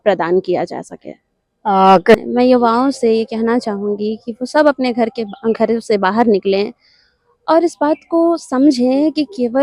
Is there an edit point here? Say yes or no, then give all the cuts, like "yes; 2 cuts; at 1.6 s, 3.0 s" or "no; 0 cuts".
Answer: yes; 1 cut; at 2.1 s